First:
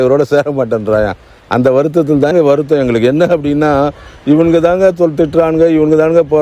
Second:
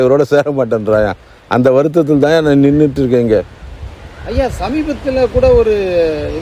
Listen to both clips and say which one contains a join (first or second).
first